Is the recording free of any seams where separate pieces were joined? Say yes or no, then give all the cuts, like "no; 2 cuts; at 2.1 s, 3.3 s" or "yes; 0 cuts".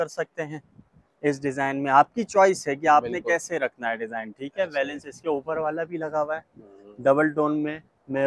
yes; 0 cuts